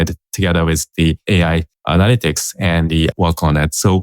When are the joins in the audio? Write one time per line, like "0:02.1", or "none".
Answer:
0:01.4
0:03.1